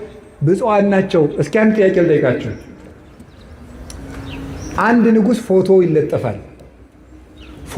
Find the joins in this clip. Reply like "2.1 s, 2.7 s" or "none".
none